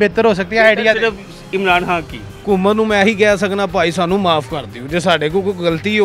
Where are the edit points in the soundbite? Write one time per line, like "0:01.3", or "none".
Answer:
0:02.3